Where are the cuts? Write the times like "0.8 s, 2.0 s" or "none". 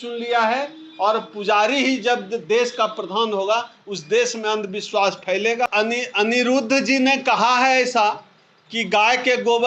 5.7 s